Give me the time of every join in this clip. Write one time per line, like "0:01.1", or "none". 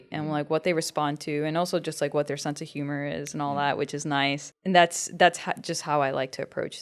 0:04.5